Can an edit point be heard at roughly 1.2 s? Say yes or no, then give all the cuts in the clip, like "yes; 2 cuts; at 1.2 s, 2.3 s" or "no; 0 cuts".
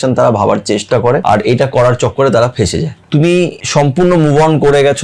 yes; 3 cuts; at 1.2 s, 3.0 s, 3.6 s